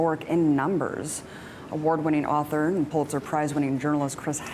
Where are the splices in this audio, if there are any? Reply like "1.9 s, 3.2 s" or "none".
2.9 s